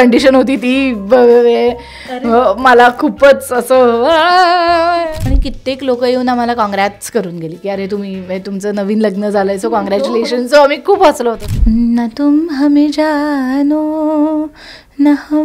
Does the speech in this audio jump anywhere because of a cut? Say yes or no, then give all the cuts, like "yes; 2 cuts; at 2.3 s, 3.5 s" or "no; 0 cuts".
yes; 2 cuts; at 5.1 s, 11.4 s